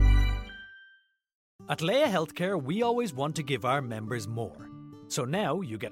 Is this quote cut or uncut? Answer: cut